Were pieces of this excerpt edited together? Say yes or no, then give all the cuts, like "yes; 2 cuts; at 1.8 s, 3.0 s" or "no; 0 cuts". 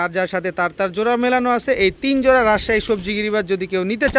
no; 0 cuts